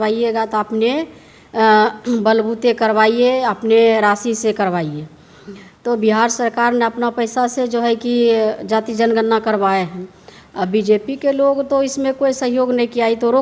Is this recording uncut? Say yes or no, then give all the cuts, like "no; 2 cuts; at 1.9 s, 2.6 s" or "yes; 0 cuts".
yes; 0 cuts